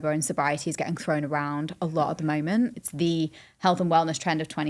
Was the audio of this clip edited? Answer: yes; 1 cut; at 2.8 s

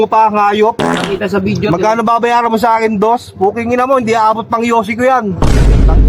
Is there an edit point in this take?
no; 0 cuts

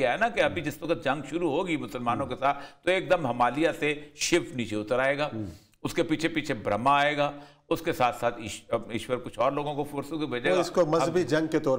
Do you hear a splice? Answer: no; 0 cuts

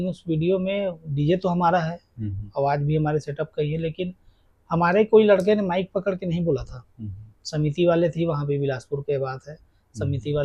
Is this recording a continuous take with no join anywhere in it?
yes; 0 cuts

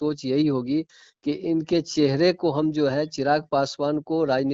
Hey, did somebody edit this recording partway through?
no; 0 cuts

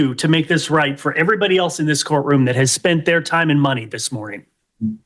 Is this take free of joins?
yes; 0 cuts

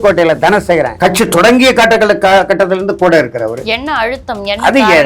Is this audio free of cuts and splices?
no; 1 cut; at 0.9 s

